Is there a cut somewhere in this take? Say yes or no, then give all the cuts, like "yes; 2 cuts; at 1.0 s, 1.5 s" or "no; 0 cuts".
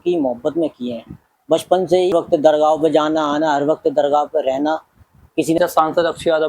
yes; 2 cuts; at 2.1 s, 5.6 s